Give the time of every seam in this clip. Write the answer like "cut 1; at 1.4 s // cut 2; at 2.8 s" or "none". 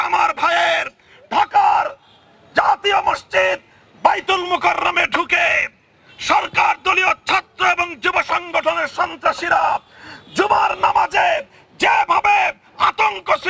none